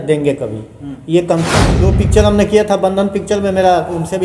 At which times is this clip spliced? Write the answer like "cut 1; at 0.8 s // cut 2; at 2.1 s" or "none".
cut 1; at 1.8 s